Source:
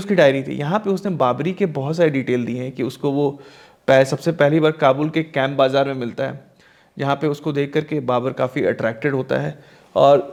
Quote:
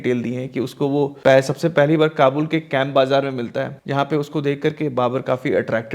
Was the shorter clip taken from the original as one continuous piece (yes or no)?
no